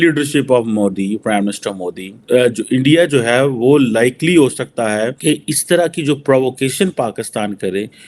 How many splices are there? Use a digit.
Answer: 2